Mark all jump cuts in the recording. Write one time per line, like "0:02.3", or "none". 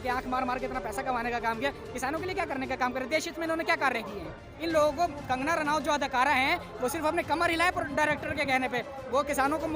0:04.4